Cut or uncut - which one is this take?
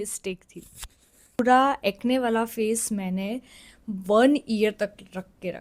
cut